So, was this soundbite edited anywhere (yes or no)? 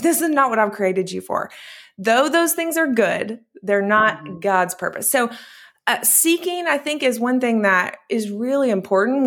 no